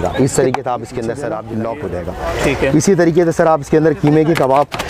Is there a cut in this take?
yes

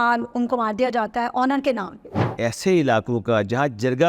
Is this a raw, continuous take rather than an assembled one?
no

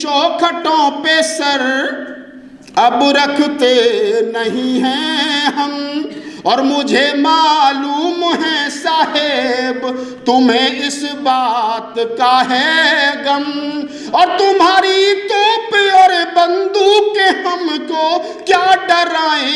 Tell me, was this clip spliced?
no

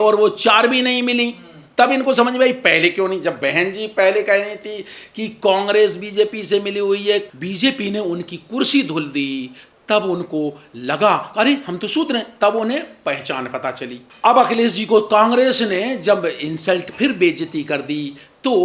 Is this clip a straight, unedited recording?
no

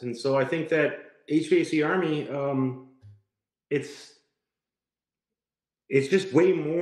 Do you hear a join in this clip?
no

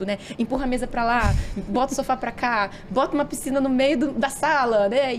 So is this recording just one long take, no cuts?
yes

